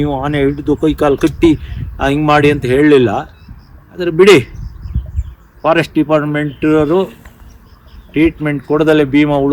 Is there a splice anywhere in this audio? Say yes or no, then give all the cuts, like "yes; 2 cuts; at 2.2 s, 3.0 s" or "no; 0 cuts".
no; 0 cuts